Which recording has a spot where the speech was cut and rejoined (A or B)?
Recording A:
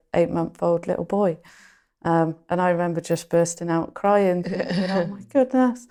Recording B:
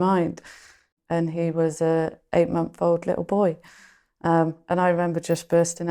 B